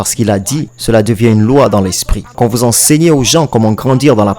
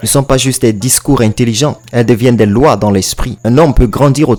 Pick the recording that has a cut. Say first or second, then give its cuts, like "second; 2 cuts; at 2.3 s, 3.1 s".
first; 1 cut; at 2.3 s